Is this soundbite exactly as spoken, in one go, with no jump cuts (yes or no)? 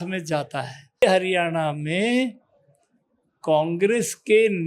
no